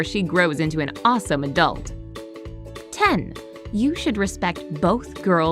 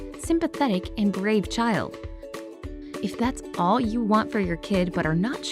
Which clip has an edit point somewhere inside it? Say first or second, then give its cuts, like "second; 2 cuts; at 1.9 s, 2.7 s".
first; 1 cut; at 3.3 s